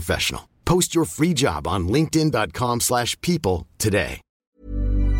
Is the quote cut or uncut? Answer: cut